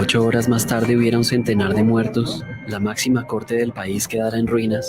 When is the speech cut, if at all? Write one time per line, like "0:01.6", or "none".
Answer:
0:00.9